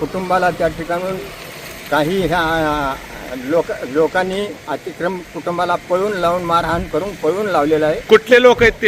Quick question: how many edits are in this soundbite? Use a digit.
0